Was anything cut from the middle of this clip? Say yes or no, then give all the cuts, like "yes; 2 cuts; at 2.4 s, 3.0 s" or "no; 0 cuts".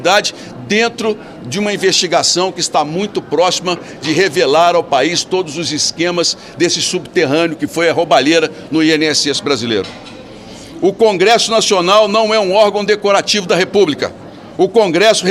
no; 0 cuts